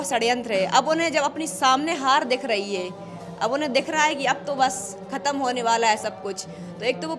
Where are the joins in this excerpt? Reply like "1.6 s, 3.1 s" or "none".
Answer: none